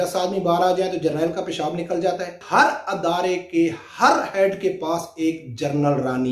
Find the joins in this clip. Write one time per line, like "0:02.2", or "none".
0:02.4